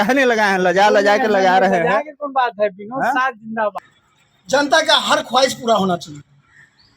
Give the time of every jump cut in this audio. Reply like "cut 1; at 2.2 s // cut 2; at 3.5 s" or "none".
cut 1; at 3.8 s